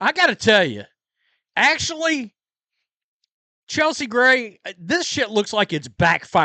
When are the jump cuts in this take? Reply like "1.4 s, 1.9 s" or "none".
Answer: 5.5 s